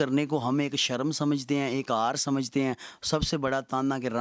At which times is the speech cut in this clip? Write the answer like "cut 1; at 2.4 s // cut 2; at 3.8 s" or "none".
none